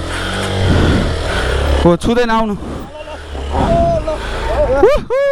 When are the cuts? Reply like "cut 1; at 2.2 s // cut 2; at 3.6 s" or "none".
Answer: none

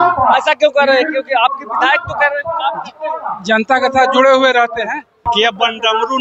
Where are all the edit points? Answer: cut 1; at 5.2 s

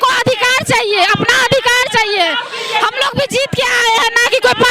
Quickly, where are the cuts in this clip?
none

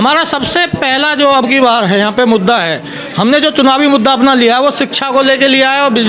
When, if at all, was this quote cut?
none

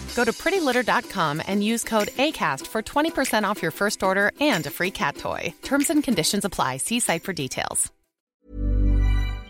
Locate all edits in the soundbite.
cut 1; at 8.4 s

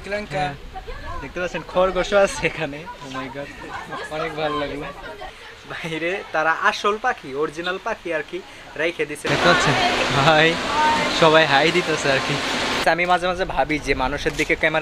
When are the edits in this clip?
cut 1; at 9.3 s

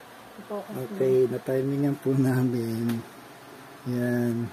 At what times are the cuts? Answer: none

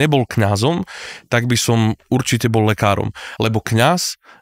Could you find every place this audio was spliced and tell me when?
cut 1; at 3.3 s

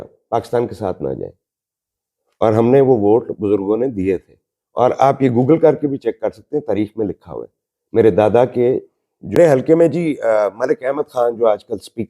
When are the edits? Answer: cut 1; at 9.4 s

